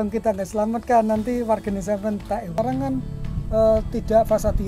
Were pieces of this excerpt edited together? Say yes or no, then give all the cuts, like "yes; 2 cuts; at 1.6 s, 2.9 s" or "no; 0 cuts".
yes; 1 cut; at 2.6 s